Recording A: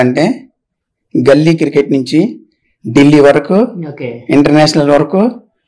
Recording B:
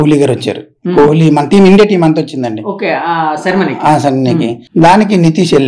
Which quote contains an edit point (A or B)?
B